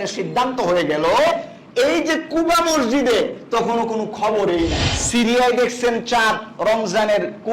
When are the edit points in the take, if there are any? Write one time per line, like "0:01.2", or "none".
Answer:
0:04.9